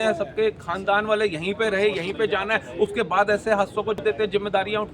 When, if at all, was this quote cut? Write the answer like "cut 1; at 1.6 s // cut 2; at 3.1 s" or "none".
cut 1; at 4.0 s